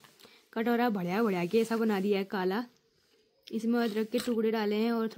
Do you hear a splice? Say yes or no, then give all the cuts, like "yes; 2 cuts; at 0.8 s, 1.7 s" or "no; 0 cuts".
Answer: no; 0 cuts